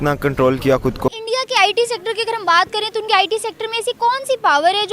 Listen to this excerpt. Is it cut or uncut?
cut